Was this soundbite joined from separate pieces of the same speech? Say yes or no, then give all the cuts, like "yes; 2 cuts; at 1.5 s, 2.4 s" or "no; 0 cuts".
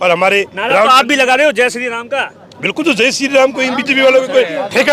no; 0 cuts